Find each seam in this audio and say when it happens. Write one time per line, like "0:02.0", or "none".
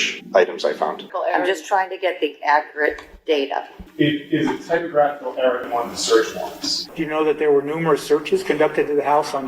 0:01.1
0:03.8
0:06.8